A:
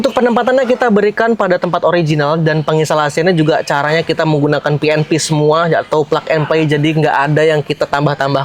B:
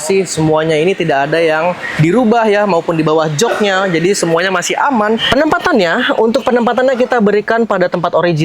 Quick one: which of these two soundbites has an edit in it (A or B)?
B